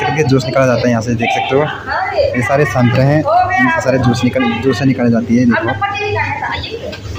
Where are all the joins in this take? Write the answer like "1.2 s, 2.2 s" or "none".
none